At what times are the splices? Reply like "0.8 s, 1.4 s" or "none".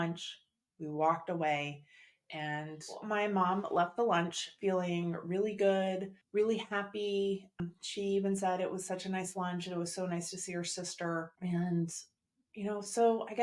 6.1 s, 7.6 s, 11.3 s